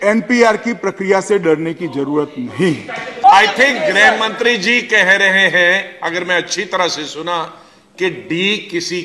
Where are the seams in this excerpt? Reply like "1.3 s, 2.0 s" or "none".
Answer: 3.2 s

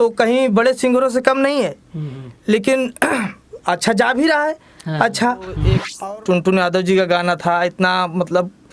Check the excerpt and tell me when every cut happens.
5.8 s

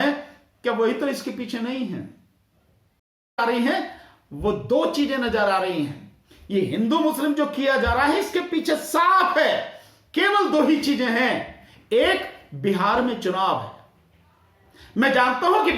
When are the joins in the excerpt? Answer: 3.4 s

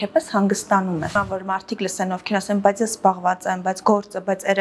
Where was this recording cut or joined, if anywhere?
1.2 s

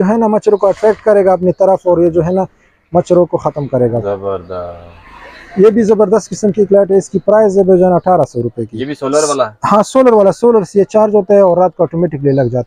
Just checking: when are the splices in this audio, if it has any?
none

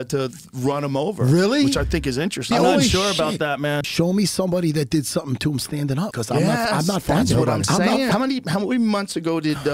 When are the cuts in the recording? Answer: 2.5 s, 3.8 s, 8.1 s

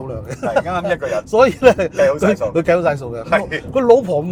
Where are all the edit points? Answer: none

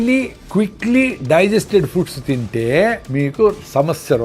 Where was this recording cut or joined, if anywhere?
3.0 s

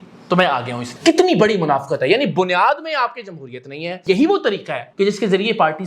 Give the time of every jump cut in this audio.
0.9 s, 4.0 s

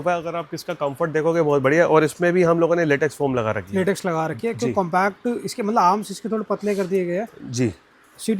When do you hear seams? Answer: none

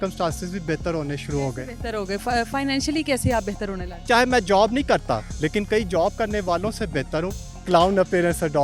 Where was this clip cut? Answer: 3.9 s, 5.3 s, 7.5 s

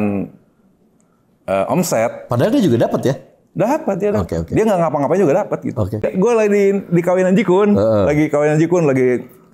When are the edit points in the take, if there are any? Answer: 6.0 s

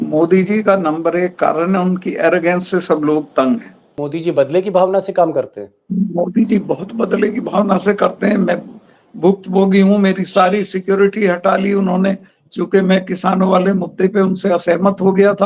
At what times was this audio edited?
4.0 s

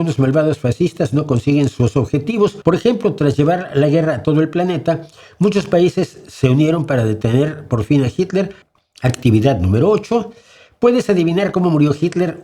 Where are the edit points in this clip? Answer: 2.6 s, 8.6 s

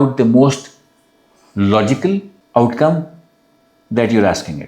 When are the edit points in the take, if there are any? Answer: 2.3 s

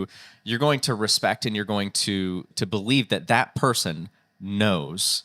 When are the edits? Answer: 2.5 s

